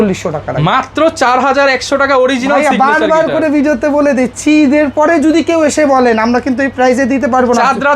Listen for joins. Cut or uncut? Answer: uncut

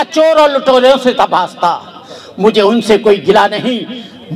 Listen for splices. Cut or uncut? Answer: uncut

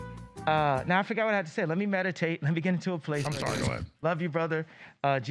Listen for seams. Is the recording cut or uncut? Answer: uncut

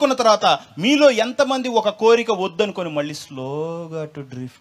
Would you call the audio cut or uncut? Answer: uncut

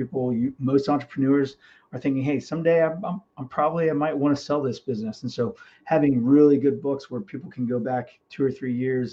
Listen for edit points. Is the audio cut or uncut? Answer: uncut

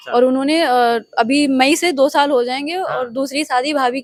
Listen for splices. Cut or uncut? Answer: uncut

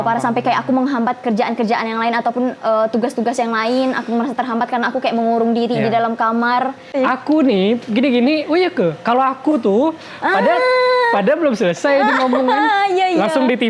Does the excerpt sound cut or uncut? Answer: cut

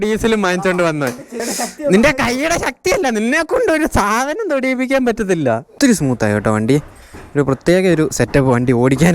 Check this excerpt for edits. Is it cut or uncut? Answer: cut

